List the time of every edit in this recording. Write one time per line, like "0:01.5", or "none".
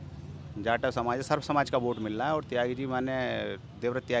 none